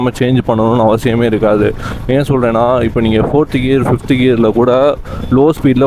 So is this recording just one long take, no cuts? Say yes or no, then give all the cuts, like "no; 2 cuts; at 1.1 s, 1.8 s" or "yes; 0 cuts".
yes; 0 cuts